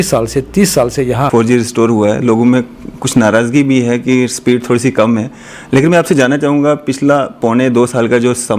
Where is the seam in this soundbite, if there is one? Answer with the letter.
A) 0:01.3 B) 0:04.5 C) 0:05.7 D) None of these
A